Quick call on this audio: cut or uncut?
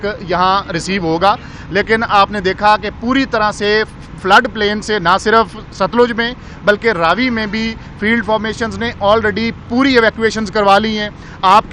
uncut